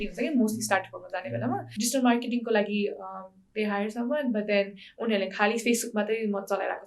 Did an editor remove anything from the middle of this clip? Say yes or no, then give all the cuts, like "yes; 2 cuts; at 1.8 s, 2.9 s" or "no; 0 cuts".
yes; 1 cut; at 1.7 s